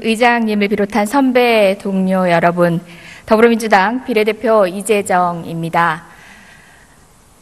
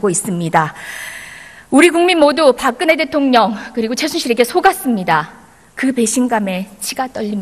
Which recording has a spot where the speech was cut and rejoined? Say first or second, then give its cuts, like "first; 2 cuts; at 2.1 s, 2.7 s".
second; 1 cut; at 6.3 s